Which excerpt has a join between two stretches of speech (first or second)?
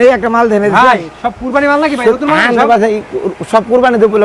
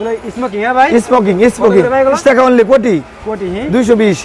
second